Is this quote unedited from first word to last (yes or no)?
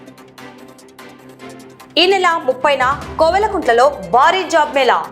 no